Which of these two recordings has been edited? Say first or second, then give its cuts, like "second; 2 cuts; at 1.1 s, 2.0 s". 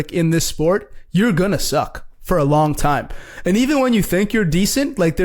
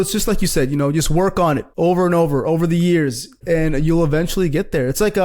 second; 2 cuts; at 1.7 s, 3.3 s